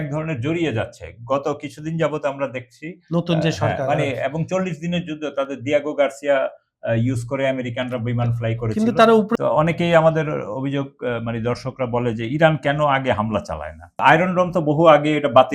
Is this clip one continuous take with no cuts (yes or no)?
no